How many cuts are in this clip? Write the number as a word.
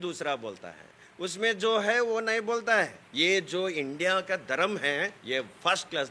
two